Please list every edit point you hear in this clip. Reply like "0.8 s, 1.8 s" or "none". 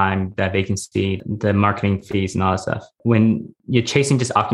1.2 s, 2.9 s, 3.5 s